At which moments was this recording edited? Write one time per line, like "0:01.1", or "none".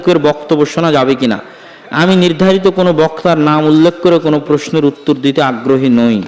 none